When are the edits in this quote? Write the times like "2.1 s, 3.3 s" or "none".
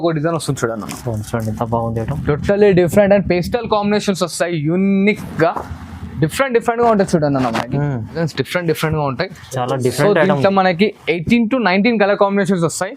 8.2 s